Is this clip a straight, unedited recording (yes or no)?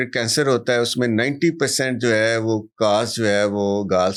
yes